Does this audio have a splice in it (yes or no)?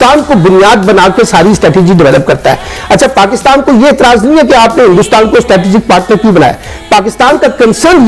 yes